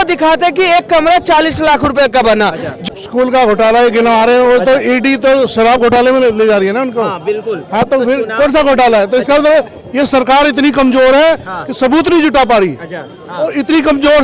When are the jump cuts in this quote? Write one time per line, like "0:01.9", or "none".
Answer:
0:02.7